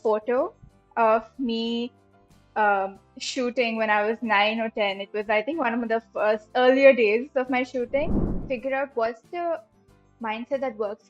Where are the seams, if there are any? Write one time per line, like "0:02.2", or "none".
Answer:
0:08.3